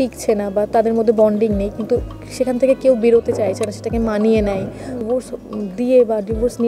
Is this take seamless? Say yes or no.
no